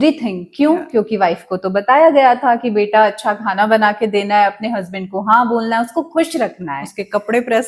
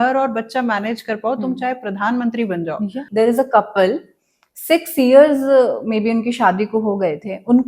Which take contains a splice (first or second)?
second